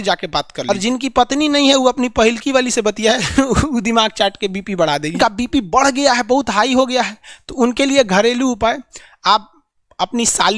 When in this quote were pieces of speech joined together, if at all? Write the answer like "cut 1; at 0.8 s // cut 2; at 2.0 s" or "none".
cut 1; at 0.7 s // cut 2; at 5.2 s

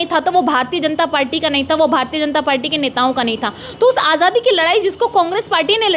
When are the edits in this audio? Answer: none

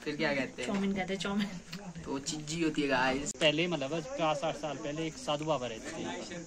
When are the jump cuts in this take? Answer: cut 1; at 3.3 s

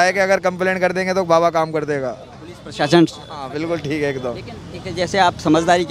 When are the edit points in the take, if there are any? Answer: none

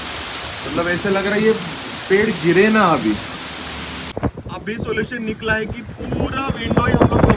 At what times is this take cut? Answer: cut 1; at 4.1 s

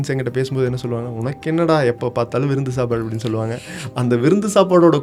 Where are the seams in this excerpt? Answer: none

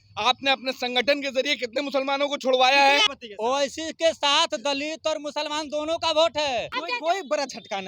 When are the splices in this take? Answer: cut 1; at 3.1 s // cut 2; at 6.8 s

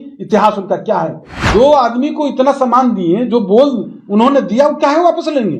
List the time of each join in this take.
cut 1; at 1.4 s

